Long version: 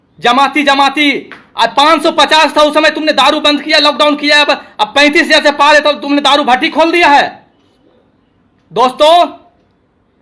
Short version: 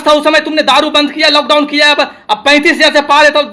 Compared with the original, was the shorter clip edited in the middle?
no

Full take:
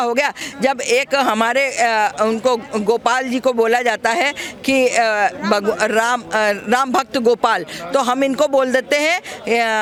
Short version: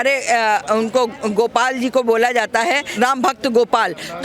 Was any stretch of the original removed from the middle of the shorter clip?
yes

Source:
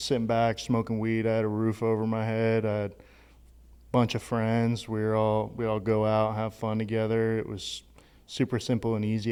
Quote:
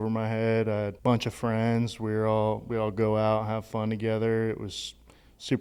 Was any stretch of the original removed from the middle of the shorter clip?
yes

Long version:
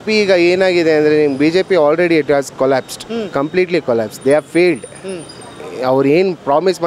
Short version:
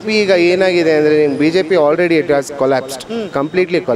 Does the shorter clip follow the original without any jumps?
yes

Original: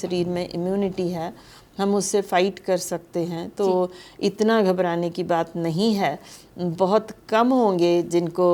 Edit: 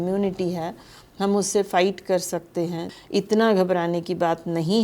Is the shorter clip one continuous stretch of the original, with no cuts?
no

